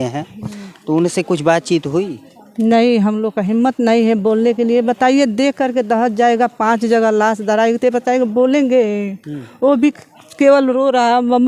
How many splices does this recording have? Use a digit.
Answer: 0